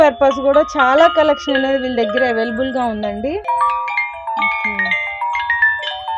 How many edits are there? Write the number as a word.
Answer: one